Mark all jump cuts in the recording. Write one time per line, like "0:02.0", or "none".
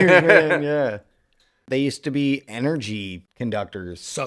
0:01.6
0:03.2